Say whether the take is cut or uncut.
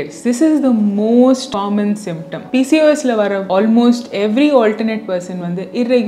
uncut